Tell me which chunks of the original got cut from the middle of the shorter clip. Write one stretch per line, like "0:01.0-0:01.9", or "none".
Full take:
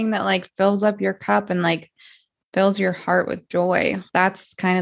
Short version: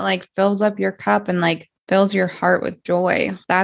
0:01.9-0:02.4